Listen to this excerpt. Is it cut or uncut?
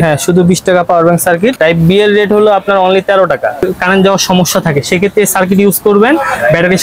cut